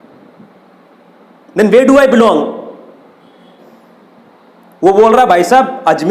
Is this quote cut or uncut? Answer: cut